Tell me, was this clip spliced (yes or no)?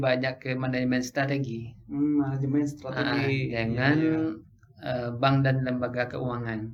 no